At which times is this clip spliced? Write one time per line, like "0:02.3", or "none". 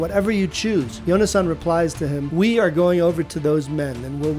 0:00.9
0:02.2